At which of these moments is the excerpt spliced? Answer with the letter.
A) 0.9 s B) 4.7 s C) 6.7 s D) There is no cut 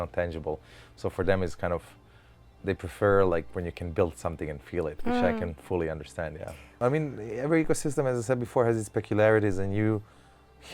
C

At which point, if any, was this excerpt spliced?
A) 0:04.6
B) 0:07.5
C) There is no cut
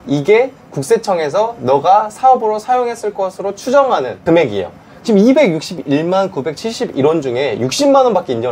A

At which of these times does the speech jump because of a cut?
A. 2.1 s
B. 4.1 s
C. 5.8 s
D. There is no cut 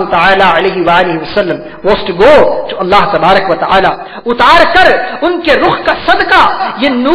D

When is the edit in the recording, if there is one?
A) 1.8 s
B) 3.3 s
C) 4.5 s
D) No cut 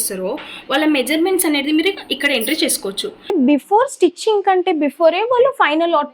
B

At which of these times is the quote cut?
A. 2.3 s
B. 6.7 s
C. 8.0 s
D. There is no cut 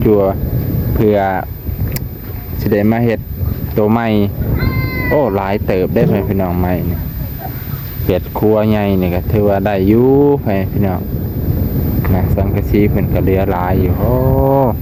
D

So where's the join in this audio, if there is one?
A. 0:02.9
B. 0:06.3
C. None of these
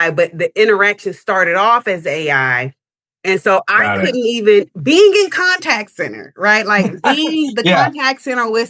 C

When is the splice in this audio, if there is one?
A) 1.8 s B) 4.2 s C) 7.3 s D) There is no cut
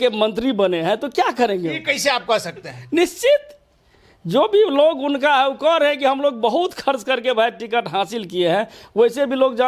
D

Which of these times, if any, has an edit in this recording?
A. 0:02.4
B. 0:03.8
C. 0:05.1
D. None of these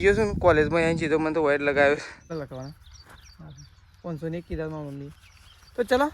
A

